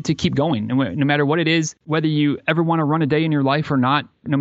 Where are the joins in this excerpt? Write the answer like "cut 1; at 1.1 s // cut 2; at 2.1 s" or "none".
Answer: cut 1; at 1.8 s